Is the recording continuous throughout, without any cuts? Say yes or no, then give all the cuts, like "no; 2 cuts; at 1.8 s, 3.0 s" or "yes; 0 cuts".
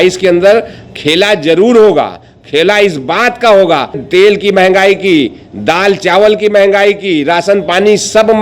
no; 1 cut; at 4.0 s